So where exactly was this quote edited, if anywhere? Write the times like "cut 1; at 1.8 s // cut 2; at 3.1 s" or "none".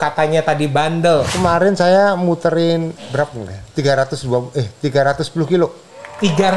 cut 1; at 1.3 s